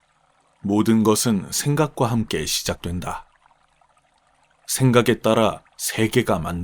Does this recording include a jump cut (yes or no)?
yes